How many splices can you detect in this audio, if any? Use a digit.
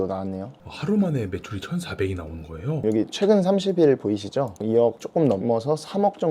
2